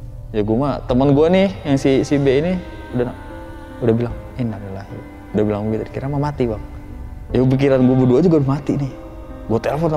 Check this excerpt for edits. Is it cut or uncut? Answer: uncut